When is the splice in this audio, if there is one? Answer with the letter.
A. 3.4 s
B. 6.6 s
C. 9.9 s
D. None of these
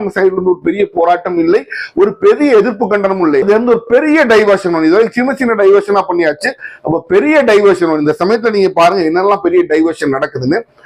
A